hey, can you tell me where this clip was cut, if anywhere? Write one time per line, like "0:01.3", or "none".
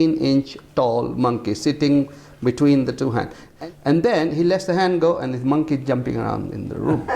0:03.4